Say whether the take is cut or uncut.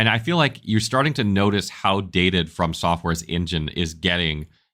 uncut